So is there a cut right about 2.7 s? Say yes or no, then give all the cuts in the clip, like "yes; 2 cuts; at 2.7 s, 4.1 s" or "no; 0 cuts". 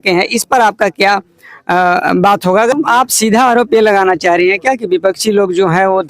yes; 1 cut; at 2.7 s